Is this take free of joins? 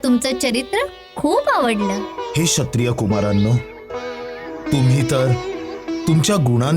no; 1 cut; at 2.1 s

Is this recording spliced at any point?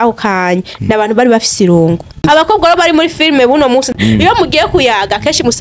yes; 2 cuts; at 2.2 s, 3.9 s

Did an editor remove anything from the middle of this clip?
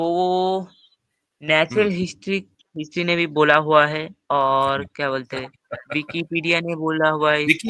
no; 0 cuts

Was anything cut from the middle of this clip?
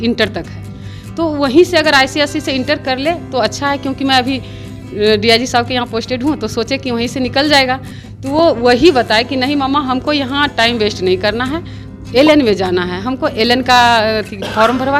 no; 0 cuts

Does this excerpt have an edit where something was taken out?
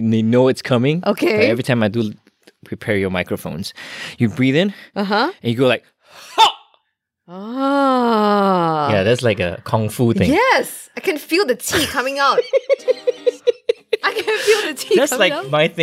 no; 0 cuts

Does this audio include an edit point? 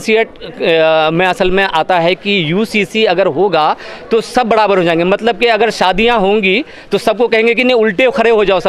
no; 0 cuts

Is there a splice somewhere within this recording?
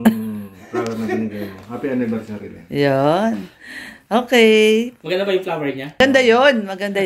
no; 0 cuts

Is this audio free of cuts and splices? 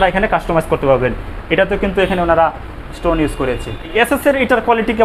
no; 1 cut; at 3.9 s

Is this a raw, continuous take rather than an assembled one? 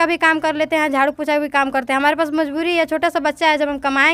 yes; 0 cuts

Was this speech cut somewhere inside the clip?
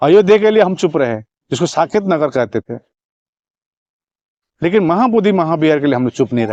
no; 0 cuts

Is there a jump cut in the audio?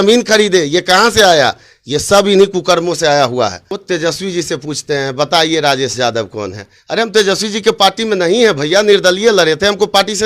yes; 1 cut; at 3.7 s

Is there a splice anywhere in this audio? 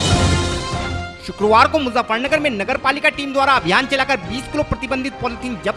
yes; 1 cut; at 1.1 s

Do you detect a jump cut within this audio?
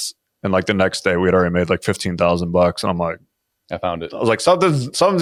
no; 0 cuts

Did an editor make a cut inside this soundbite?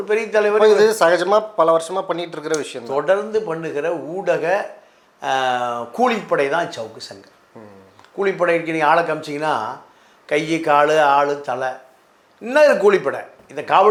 no; 0 cuts

